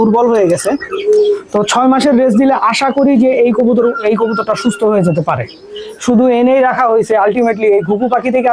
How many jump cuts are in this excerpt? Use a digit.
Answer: 2